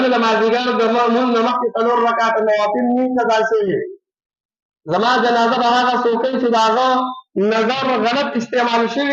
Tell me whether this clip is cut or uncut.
uncut